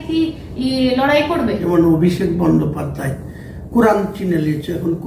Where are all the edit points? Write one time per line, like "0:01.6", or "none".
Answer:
0:01.6